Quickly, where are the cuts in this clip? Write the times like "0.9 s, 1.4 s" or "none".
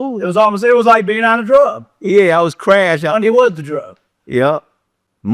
none